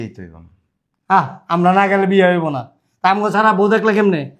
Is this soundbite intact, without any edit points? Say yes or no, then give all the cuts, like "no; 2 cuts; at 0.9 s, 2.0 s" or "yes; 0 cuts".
yes; 0 cuts